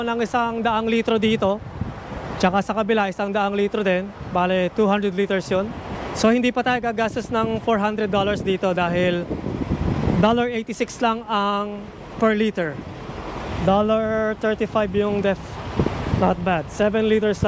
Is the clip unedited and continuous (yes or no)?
no